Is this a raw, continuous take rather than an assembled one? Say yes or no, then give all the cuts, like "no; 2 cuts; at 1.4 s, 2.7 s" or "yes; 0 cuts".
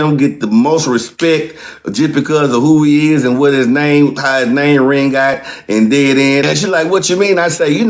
no; 1 cut; at 6.4 s